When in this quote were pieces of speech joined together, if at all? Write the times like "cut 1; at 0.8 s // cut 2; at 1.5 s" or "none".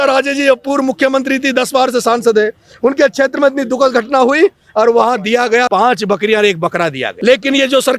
cut 1; at 5.7 s // cut 2; at 7.1 s